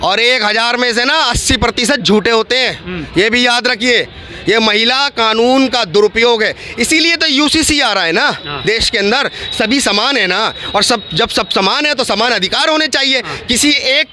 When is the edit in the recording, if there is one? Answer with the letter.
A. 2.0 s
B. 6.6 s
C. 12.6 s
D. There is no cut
D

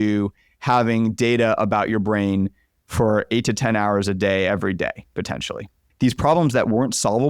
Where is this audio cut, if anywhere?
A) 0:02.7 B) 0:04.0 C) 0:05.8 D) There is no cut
C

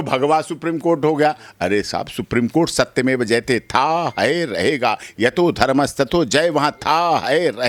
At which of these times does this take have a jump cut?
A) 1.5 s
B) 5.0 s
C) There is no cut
C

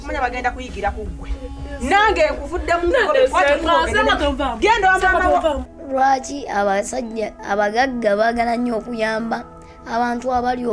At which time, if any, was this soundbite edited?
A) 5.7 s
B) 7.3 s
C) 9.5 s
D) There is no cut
A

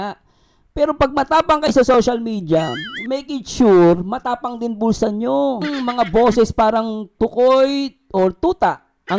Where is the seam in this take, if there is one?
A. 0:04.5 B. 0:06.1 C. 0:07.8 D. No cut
B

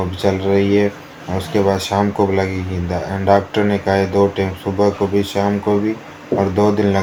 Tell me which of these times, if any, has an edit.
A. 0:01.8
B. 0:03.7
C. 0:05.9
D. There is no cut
D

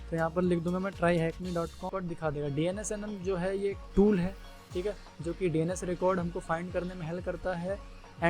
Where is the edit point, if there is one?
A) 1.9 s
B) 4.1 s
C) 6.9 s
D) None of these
A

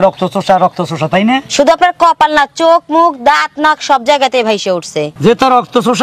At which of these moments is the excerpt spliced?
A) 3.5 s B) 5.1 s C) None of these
B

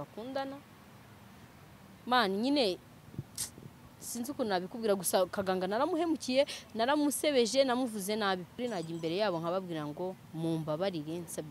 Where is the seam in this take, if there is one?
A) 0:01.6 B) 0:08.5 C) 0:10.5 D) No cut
B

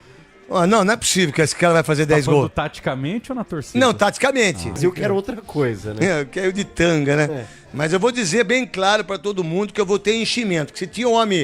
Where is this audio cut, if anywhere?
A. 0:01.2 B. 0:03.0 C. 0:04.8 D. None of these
C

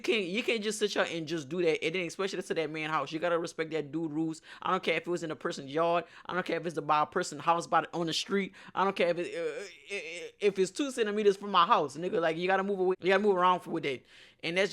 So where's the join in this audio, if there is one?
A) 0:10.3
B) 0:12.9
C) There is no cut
B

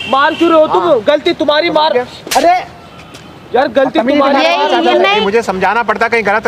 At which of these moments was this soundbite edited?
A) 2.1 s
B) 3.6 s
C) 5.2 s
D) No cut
C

